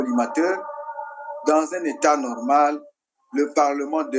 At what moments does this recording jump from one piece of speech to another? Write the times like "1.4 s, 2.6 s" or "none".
none